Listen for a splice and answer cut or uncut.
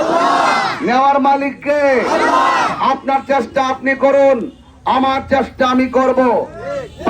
uncut